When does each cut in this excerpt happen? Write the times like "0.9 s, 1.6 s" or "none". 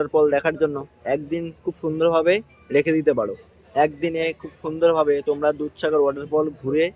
none